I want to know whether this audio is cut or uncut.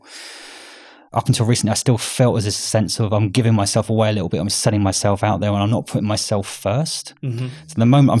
cut